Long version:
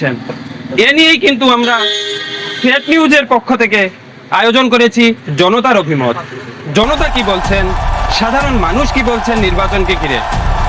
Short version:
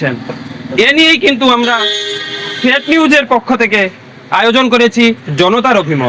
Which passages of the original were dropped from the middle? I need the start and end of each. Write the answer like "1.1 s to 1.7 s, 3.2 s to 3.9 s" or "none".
none